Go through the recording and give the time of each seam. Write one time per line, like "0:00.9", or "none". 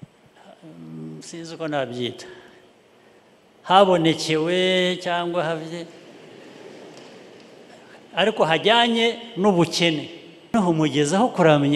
0:10.5